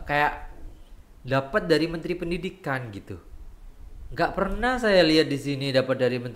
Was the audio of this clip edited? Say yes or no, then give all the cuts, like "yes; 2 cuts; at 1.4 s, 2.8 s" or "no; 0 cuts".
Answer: no; 0 cuts